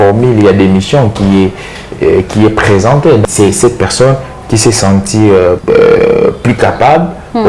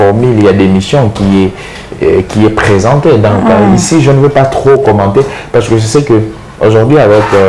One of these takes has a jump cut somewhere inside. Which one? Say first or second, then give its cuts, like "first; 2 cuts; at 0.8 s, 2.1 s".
first; 2 cuts; at 3.2 s, 5.6 s